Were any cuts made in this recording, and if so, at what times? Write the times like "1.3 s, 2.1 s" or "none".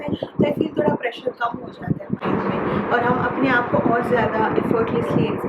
none